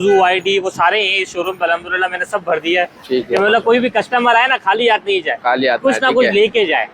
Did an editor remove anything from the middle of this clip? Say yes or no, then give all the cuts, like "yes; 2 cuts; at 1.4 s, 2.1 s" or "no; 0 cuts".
no; 0 cuts